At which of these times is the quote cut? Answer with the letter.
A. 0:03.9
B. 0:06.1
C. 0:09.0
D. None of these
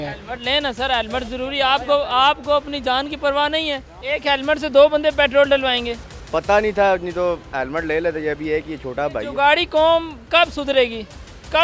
A